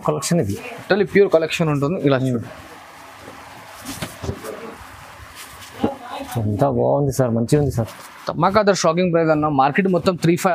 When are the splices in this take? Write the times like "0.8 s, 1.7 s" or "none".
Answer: none